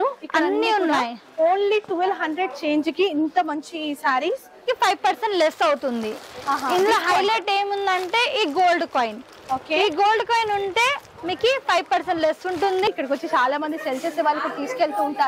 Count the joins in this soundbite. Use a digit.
2